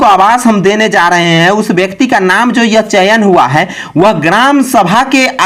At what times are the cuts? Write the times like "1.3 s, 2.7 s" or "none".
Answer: none